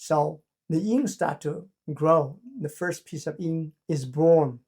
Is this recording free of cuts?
no; 1 cut; at 3.8 s

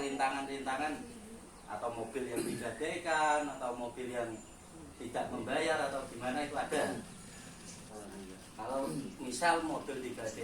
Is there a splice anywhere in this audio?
yes; 1 cut; at 7.9 s

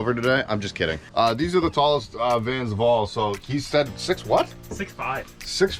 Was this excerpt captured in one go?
no; 1 cut; at 1.0 s

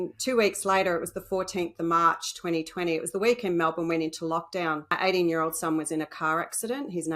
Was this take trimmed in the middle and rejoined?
yes; 1 cut; at 4.9 s

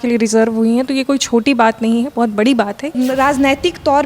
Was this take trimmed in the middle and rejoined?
yes; 1 cut; at 2.9 s

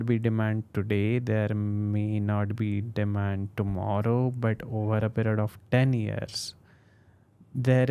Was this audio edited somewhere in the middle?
no; 0 cuts

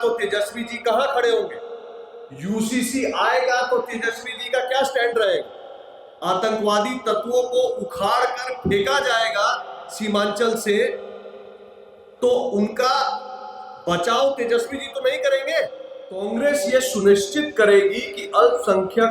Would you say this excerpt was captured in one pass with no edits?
no; 1 cut; at 16.3 s

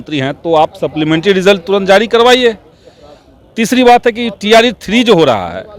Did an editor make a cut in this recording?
no; 0 cuts

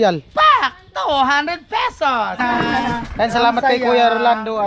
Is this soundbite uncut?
no; 1 cut; at 2.4 s

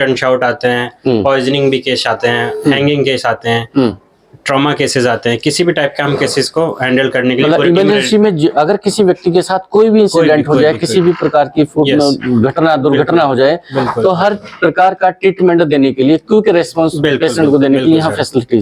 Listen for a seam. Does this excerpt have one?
no; 0 cuts

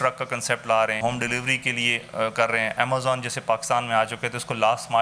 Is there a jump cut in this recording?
yes; 1 cut; at 1.0 s

